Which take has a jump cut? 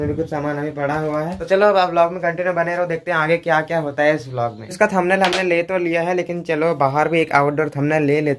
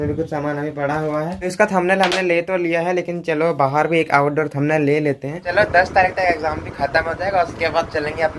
second; 2 cuts; at 1.4 s, 5.4 s

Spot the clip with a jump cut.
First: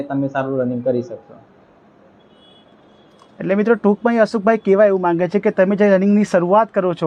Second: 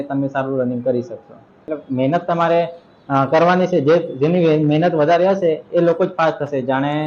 second; 1 cut; at 1.7 s

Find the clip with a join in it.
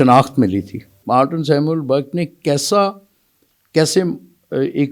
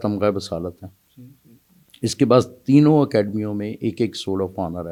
first; 1 cut; at 1.0 s

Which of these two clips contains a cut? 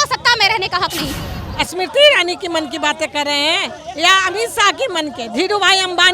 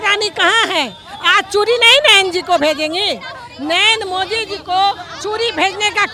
first; 1 cut; at 1.2 s

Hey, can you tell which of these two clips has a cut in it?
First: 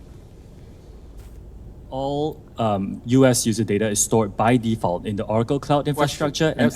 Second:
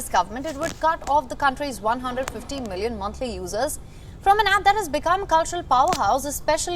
first; 1 cut; at 4.8 s

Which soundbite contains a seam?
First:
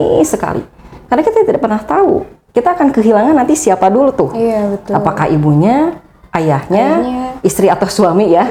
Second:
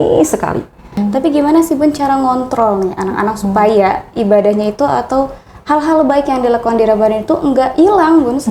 second; 1 cut; at 1.0 s

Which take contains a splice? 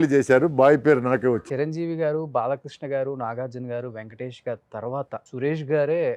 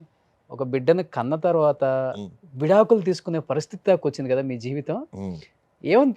first; 2 cuts; at 1.4 s, 5.3 s

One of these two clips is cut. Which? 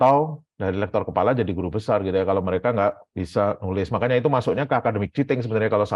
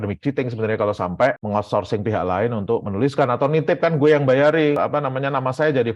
second; 1 cut; at 4.8 s

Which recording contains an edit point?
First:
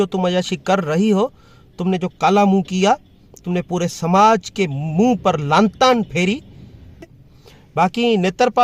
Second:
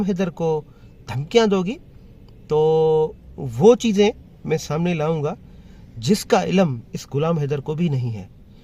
first; 1 cut; at 7.2 s

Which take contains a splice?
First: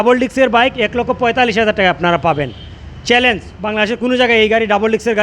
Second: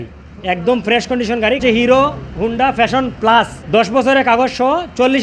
second; 2 cuts; at 1.6 s, 3.6 s

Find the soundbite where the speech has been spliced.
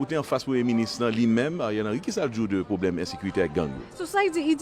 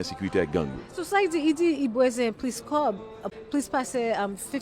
second; 1 cut; at 3.3 s

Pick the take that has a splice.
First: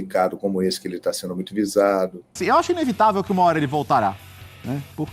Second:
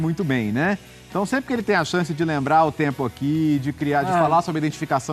first; 1 cut; at 2.4 s

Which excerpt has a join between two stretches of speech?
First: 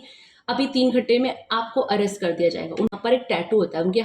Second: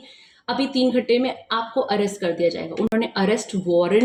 first; 1 cut; at 2.9 s

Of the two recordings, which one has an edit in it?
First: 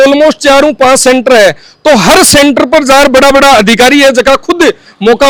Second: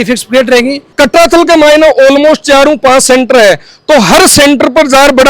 second; 1 cut; at 0.9 s

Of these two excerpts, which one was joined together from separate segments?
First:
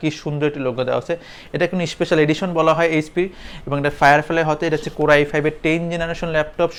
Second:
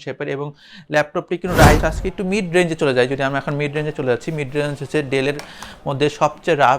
second; 1 cut; at 1.8 s

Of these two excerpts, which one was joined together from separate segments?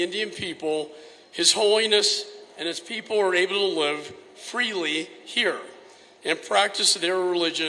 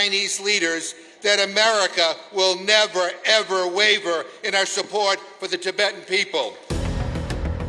second; 1 cut; at 6.6 s

